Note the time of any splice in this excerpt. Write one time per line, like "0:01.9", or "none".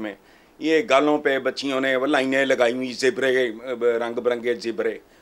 none